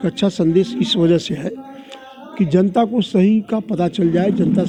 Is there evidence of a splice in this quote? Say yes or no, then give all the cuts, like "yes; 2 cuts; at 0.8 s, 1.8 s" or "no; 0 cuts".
no; 0 cuts